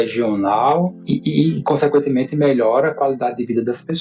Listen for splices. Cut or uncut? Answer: cut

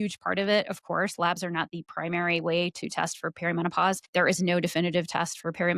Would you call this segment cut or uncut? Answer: cut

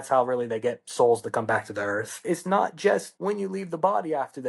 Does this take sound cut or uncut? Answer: cut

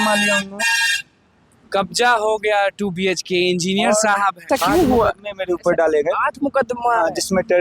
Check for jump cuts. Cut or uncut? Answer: cut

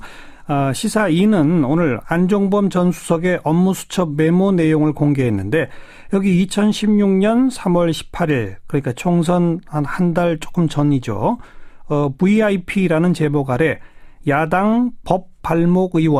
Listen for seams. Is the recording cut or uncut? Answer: uncut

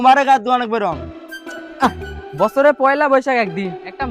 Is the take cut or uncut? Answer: uncut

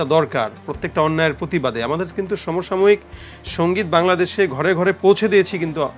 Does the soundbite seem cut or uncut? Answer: uncut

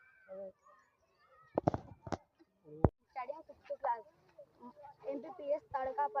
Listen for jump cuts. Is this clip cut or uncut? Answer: cut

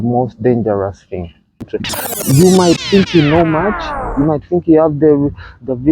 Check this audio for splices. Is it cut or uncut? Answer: cut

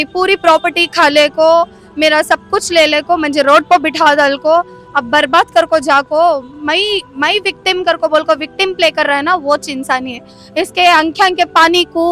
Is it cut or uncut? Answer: uncut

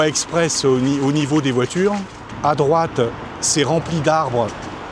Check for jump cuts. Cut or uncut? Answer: cut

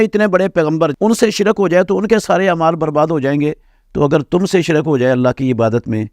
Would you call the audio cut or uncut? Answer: cut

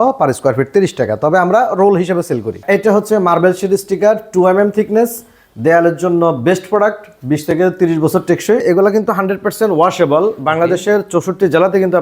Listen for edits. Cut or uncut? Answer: cut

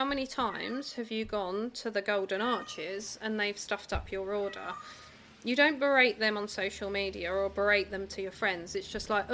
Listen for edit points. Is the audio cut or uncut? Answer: uncut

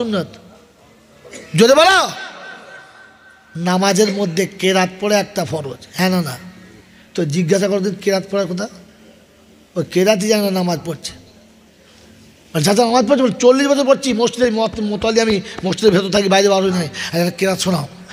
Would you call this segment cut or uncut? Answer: uncut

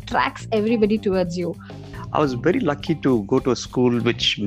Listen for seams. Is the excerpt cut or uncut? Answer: cut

